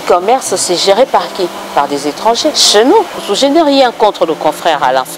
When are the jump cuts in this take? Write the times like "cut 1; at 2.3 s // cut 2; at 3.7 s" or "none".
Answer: cut 1; at 2.6 s // cut 2; at 3.2 s